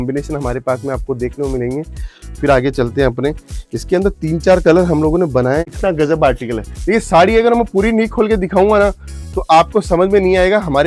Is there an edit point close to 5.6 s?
yes; 1 cut; at 5.6 s

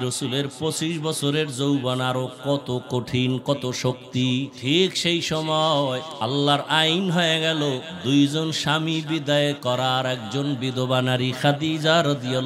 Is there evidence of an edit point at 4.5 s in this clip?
yes; 3 cuts; at 4.5 s, 6.1 s, 7.9 s

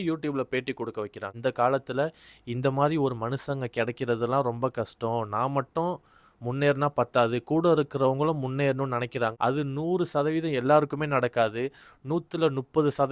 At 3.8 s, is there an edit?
no; 2 cuts; at 1.3 s, 9.3 s

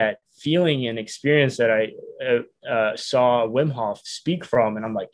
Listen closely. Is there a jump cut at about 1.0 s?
no; 0 cuts

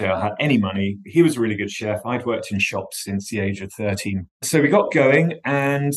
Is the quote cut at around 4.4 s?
yes; 1 cut; at 4.4 s

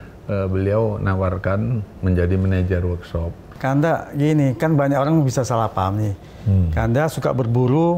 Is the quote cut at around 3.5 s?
yes; 1 cut; at 3.5 s

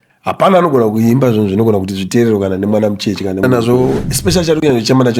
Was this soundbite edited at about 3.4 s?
yes; 1 cut; at 3.4 s

